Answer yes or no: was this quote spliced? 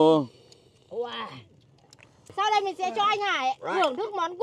yes